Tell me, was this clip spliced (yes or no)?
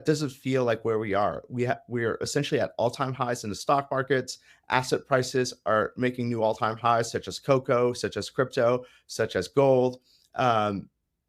no